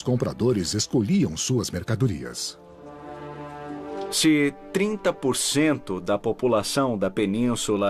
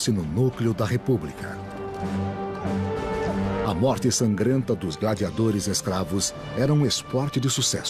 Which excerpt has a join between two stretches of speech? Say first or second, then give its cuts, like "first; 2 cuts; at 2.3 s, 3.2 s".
first; 1 cut; at 1.3 s